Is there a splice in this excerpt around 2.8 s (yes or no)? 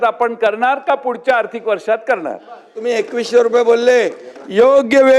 yes